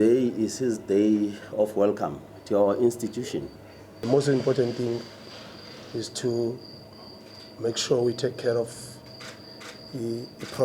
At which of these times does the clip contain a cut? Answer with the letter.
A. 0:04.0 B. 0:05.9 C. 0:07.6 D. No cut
A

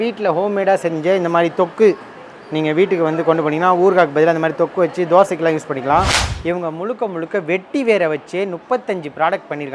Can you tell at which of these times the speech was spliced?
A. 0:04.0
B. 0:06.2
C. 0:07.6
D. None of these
B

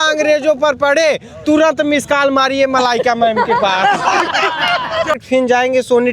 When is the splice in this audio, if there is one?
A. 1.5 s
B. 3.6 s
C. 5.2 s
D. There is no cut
C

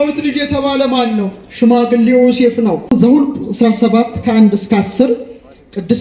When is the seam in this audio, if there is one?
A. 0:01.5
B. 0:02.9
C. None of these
B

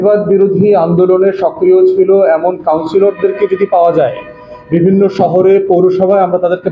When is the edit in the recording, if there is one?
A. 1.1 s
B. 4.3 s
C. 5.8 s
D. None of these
D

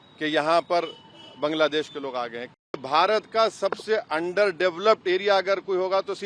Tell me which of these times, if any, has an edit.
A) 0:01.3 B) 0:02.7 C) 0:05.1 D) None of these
B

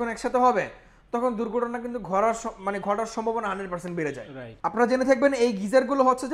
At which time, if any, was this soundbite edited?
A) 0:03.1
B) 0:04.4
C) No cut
B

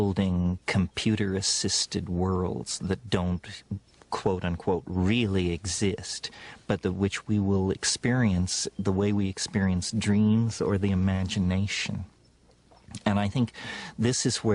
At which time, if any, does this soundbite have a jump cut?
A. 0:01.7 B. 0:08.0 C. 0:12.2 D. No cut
A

